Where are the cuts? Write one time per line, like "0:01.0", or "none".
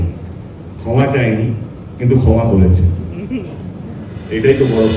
none